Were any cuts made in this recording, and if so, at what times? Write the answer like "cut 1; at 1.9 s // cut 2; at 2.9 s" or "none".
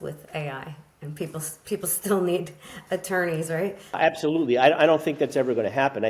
cut 1; at 4.0 s